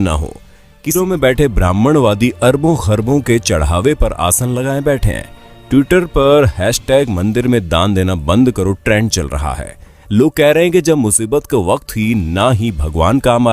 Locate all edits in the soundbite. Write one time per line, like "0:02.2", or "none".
0:01.0